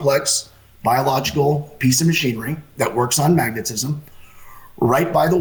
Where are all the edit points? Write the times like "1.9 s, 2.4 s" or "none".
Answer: none